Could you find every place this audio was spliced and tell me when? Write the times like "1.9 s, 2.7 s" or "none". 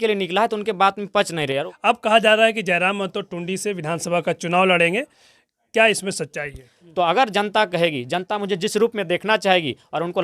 1.7 s, 6.8 s